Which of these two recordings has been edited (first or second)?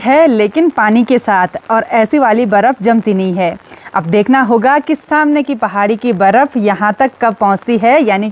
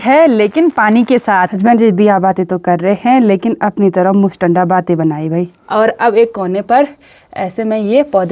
second